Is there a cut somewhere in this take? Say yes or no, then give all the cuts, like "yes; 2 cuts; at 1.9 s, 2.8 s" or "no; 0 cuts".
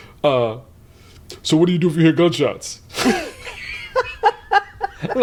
no; 0 cuts